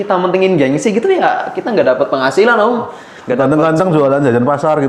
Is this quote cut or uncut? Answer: uncut